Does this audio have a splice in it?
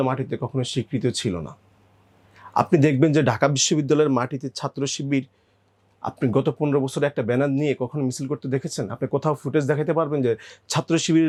no; 0 cuts

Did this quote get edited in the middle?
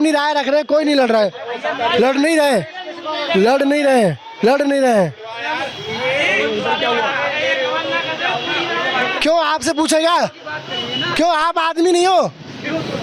no; 0 cuts

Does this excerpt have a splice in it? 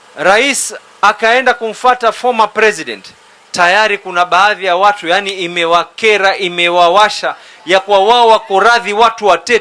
no; 0 cuts

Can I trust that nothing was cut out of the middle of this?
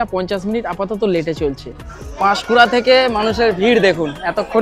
no; 1 cut; at 1.7 s

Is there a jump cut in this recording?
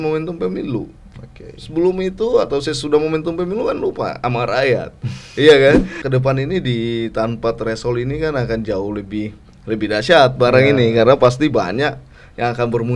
yes; 1 cut; at 5.9 s

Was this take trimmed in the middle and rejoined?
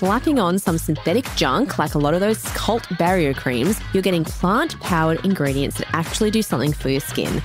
no; 0 cuts

